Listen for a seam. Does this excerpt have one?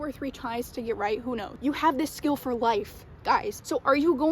no; 0 cuts

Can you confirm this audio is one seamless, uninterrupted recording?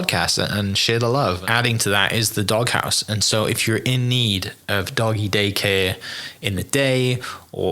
no; 1 cut; at 1.4 s

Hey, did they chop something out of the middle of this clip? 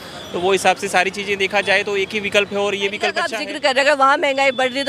yes; 1 cut; at 3.3 s

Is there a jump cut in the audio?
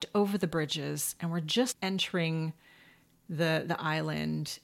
yes; 1 cut; at 1.7 s

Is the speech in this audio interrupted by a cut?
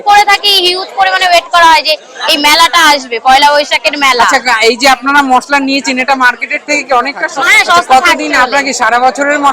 yes; 1 cut; at 7.3 s

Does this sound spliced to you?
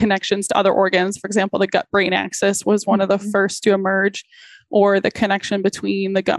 no; 0 cuts

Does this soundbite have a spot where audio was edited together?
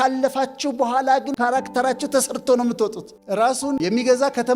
yes; 3 cuts; at 1.3 s, 3.1 s, 3.8 s

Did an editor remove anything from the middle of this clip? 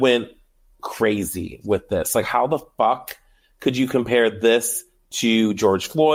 no; 0 cuts

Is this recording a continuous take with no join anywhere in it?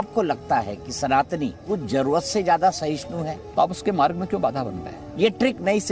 no; 3 cuts; at 1.6 s, 3.4 s, 5.0 s

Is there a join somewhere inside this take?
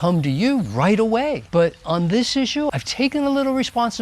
yes; 2 cuts; at 1.4 s, 2.7 s

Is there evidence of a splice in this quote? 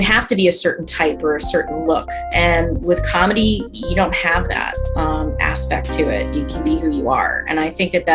yes; 1 cut; at 2.2 s

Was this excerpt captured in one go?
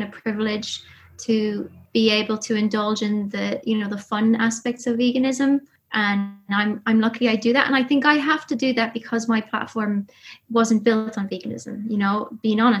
no; 2 cuts; at 1.8 s, 5.8 s

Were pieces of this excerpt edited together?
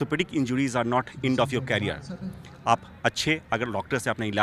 no; 0 cuts

